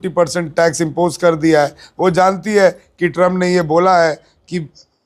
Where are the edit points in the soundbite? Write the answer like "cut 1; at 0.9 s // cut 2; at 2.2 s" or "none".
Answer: none